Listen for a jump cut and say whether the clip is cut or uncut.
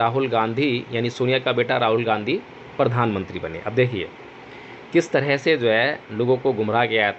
uncut